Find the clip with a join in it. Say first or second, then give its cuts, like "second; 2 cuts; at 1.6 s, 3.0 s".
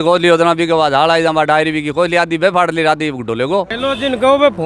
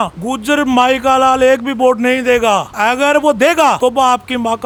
first; 1 cut; at 3.7 s